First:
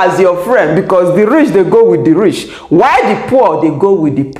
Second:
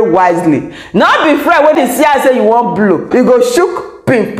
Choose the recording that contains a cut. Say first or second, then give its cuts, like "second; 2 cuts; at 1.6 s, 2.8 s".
second; 2 cuts; at 1.8 s, 3.1 s